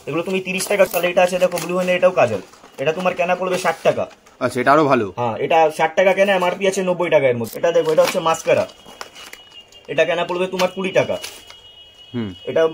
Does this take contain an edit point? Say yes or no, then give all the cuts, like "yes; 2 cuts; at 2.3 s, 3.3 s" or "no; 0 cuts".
yes; 2 cuts; at 0.9 s, 7.5 s